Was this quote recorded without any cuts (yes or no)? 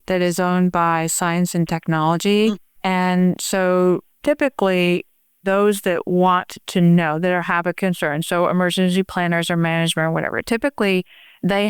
no